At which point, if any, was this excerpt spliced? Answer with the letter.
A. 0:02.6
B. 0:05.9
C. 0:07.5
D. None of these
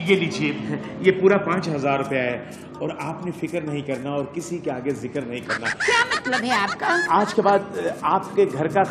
D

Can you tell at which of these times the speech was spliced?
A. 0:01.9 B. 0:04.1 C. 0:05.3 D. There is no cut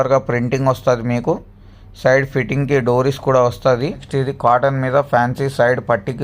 B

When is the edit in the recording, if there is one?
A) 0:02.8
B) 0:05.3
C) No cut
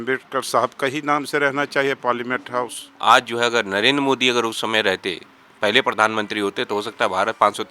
A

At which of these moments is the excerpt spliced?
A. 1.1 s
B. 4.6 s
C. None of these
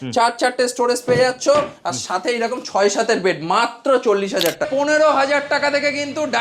B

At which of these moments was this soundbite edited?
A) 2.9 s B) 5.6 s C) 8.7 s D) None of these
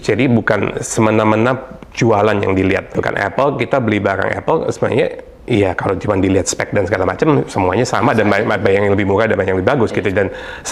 A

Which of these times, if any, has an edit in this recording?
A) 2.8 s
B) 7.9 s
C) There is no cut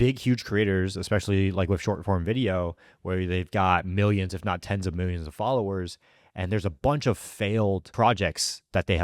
B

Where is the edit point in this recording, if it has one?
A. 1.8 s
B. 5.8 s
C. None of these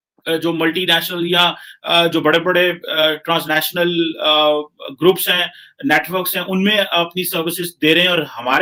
C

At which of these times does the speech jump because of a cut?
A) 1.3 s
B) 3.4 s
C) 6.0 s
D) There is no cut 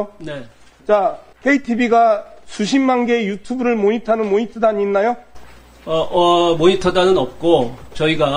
A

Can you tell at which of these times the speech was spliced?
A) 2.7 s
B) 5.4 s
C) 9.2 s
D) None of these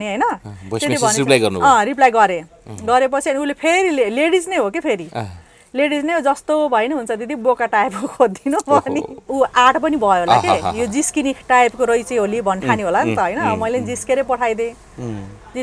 C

